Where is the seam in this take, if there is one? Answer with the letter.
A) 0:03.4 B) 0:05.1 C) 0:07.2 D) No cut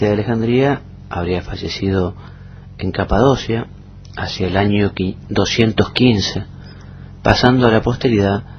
A